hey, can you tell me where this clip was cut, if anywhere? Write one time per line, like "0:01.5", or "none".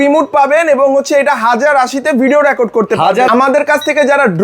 0:03.3